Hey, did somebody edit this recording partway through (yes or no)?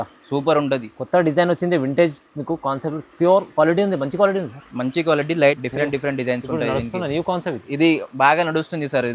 yes